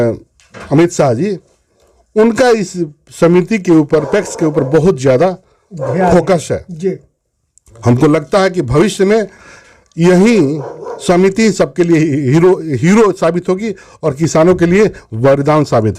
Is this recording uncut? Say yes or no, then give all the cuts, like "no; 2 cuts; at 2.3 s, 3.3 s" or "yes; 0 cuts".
yes; 0 cuts